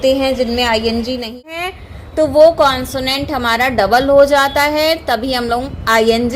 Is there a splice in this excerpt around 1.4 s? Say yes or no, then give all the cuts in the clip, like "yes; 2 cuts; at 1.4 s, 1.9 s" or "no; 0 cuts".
yes; 1 cut; at 1.4 s